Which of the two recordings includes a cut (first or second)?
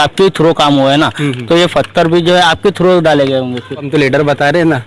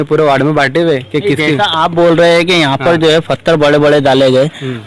first